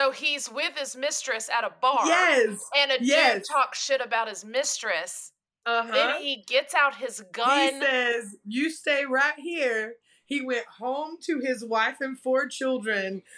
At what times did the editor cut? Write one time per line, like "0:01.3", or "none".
none

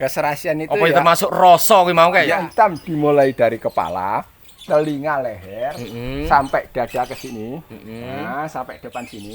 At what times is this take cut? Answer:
0:02.3

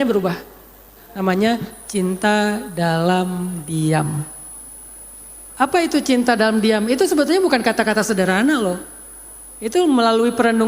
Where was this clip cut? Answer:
0:01.0

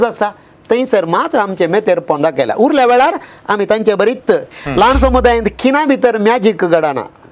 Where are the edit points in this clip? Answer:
0:04.5

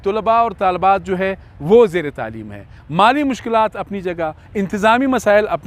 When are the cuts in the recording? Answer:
none

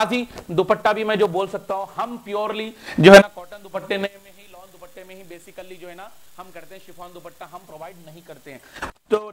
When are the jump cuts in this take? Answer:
none

